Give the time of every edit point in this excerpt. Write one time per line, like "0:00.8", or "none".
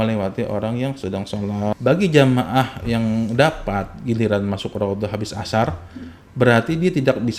0:01.8